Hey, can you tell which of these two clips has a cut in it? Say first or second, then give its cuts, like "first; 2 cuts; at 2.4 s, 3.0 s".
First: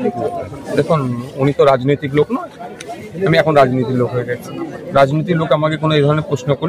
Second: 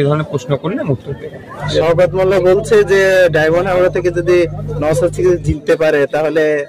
second; 1 cut; at 1.7 s